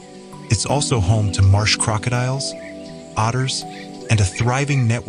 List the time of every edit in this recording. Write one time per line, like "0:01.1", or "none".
none